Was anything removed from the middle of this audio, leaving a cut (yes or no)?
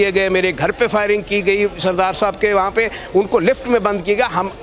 no